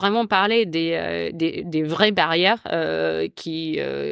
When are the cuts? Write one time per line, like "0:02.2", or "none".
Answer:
none